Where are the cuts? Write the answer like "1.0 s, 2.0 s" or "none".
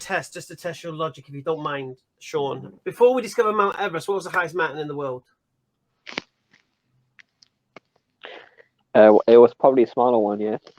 2.7 s